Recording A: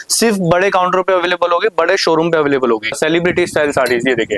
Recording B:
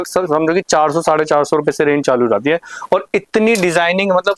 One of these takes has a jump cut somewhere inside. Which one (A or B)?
A